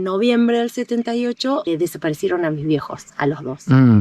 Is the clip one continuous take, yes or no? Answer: no